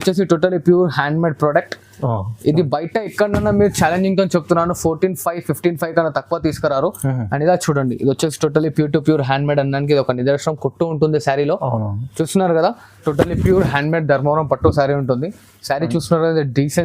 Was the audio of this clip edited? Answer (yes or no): yes